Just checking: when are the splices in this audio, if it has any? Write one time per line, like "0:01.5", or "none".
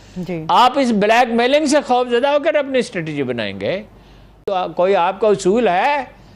0:04.4